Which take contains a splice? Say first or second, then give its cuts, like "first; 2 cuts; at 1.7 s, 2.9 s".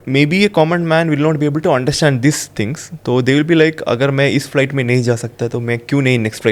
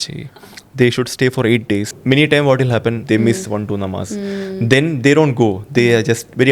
second; 2 cuts; at 1.9 s, 3.0 s